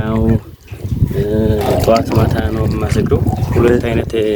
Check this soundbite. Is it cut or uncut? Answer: cut